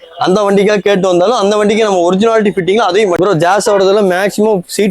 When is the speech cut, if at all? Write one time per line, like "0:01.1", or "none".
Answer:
0:03.2